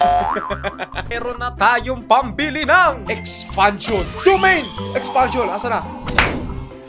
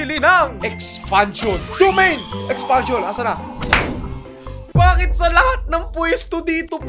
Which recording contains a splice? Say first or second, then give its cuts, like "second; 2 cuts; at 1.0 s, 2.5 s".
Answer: first; 1 cut; at 1.1 s